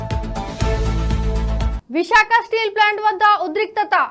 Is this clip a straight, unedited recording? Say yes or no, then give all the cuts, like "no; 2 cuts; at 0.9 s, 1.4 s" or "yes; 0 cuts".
yes; 0 cuts